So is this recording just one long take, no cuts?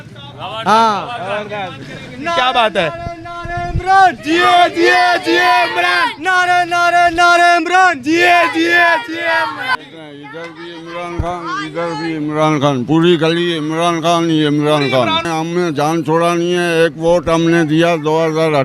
no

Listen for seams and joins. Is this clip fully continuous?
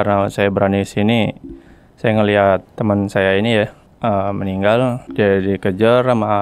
no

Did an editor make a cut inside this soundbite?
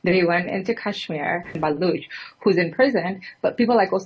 yes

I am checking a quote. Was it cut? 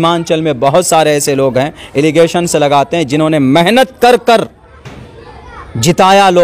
no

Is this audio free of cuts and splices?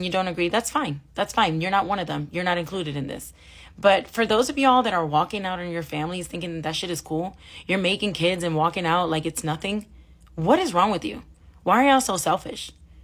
no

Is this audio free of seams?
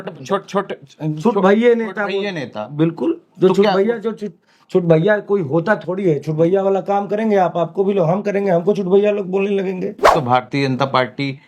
no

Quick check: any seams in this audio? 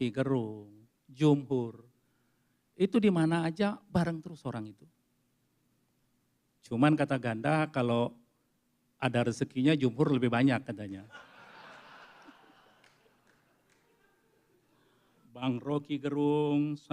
yes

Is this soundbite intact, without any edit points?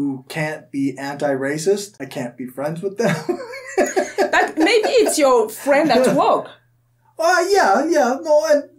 no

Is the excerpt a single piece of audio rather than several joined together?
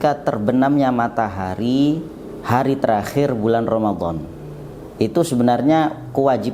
yes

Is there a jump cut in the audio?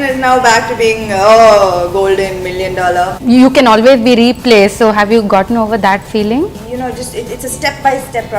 yes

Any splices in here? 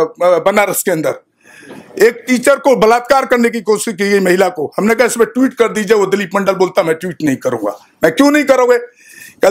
no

